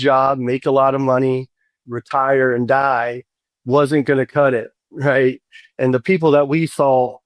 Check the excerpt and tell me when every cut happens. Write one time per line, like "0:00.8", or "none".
0:01.9
0:05.8